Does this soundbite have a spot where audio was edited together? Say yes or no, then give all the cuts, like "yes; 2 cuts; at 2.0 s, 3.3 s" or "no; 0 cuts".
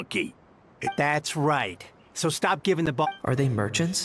yes; 2 cuts; at 1.0 s, 3.1 s